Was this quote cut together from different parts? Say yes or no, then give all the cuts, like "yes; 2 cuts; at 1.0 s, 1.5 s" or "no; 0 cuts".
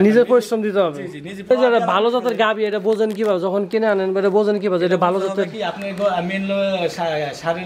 yes; 1 cut; at 1.5 s